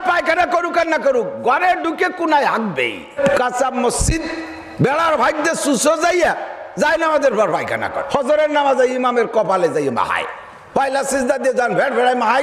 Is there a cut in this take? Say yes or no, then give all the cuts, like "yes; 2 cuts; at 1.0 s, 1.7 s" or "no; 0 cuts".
yes; 2 cuts; at 3.2 s, 8.0 s